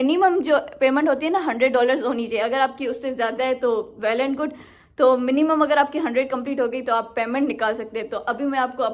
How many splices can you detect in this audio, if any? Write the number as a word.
zero